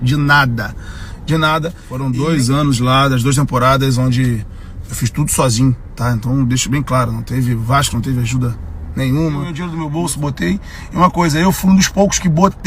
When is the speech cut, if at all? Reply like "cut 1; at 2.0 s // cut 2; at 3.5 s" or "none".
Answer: cut 1; at 1.9 s // cut 2; at 9.6 s